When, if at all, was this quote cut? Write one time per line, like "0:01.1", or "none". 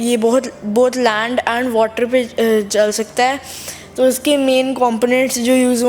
none